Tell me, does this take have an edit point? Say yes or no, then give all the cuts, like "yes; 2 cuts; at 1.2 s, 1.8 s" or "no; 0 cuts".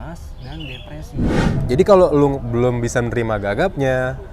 yes; 1 cut; at 1.5 s